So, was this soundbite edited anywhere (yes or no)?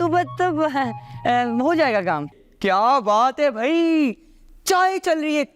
yes